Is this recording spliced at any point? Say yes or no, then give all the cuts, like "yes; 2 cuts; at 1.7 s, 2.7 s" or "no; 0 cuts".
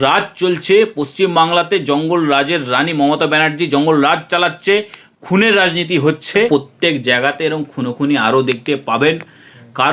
yes; 1 cut; at 6.5 s